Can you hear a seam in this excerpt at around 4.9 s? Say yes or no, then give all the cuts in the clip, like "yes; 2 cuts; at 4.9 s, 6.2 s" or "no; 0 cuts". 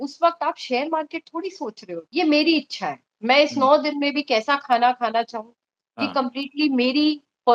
no; 1 cut; at 2.0 s